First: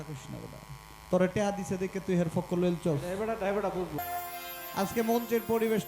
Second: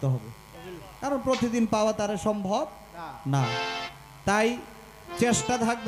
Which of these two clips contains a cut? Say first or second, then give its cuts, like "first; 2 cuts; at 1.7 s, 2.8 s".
first; 1 cut; at 4.0 s